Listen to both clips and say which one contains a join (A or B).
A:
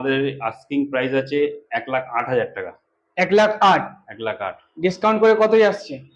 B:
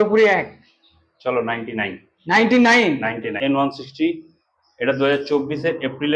B